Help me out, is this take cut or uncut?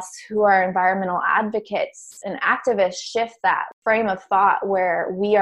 cut